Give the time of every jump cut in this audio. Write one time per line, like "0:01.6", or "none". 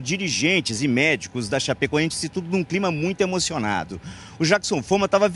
0:02.4